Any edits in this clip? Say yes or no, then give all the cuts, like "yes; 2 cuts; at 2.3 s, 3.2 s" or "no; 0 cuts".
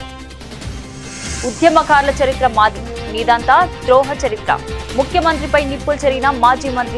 yes; 1 cut; at 1.4 s